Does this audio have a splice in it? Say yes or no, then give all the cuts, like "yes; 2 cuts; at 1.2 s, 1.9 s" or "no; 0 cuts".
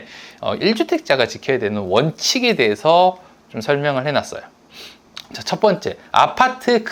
no; 0 cuts